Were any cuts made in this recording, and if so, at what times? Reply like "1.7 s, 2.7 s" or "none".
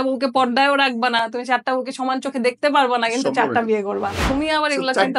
4.2 s